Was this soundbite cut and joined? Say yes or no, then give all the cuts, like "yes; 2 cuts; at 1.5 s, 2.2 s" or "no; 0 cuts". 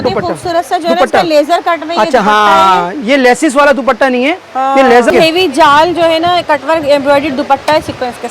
yes; 1 cut; at 5.1 s